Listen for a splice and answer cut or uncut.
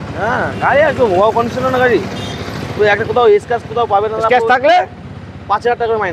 uncut